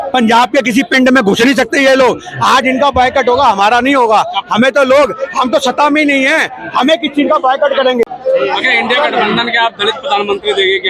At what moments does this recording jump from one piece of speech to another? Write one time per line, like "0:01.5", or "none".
none